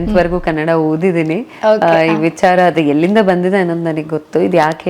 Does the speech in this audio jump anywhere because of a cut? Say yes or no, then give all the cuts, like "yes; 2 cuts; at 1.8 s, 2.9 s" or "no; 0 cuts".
no; 0 cuts